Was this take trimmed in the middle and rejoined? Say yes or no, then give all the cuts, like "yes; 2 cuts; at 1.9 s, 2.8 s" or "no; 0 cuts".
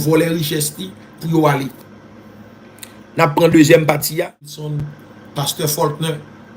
yes; 1 cut; at 4.7 s